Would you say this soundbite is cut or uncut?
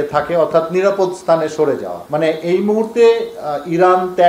cut